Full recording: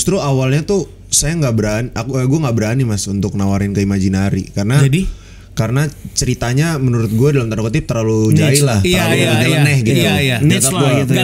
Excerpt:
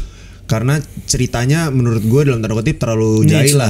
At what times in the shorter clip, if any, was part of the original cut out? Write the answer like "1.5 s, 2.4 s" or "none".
none